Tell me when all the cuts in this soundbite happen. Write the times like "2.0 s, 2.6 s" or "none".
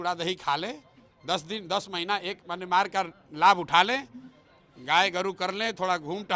none